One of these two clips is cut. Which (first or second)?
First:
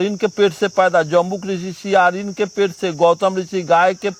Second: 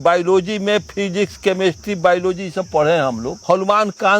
second